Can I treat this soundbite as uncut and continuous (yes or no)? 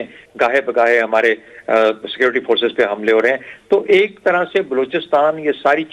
yes